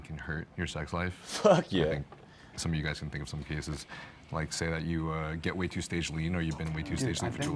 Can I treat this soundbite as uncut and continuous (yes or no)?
yes